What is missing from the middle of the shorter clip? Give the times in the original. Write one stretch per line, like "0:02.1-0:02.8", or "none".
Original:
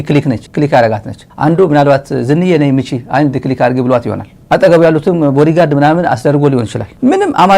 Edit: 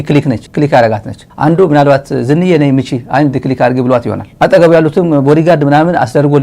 0:04.2-0:04.3